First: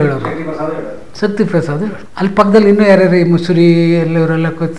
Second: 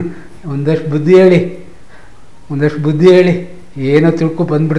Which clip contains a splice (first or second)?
first